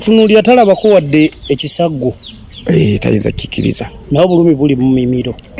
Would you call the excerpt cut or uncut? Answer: uncut